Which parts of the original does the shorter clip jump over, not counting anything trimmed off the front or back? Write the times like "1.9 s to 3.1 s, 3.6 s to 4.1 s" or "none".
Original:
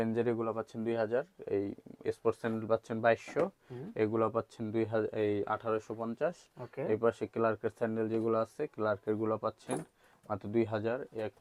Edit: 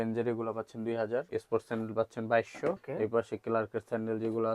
1.3 s to 2.0 s, 3.6 s to 6.7 s